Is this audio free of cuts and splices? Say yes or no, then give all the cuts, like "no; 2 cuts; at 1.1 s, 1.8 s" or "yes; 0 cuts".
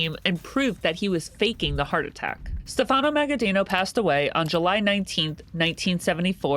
no; 1 cut; at 2.5 s